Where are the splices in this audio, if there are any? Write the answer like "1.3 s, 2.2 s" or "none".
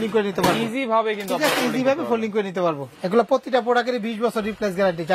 2.9 s